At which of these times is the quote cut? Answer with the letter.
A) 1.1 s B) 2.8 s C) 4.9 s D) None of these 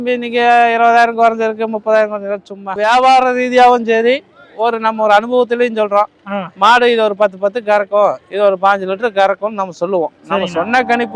B